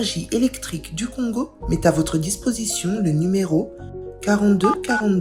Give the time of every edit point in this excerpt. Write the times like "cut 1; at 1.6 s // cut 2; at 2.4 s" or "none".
none